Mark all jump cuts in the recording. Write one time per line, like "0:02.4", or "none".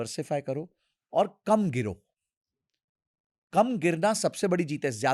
none